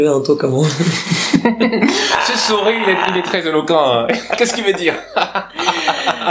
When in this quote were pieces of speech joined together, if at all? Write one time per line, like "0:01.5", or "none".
none

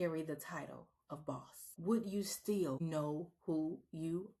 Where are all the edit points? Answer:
0:01.6
0:02.8

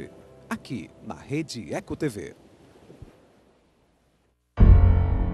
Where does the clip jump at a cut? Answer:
0:04.3

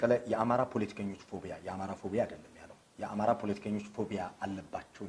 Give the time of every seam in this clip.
none

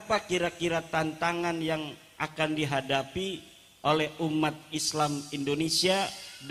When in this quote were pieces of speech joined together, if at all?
none

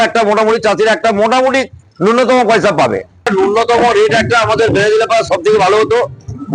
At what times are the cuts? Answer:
0:03.3

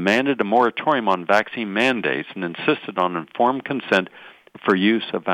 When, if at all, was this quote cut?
none

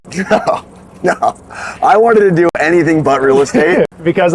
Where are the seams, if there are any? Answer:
none

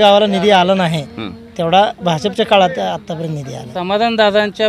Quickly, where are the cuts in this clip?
0:03.7

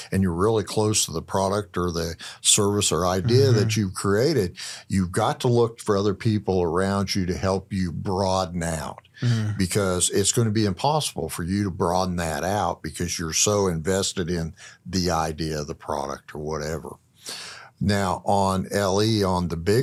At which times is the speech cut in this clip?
none

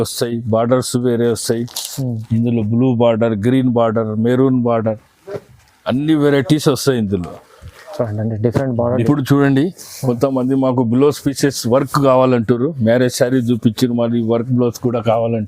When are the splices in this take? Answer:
0:09.0

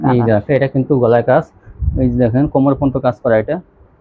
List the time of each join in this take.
none

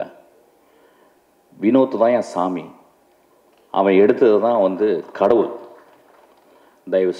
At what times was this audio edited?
none

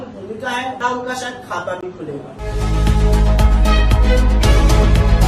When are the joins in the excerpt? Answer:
0:00.8
0:02.4

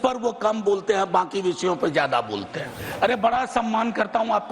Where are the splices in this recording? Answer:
0:02.8

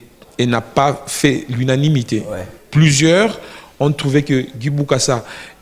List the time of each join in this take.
none

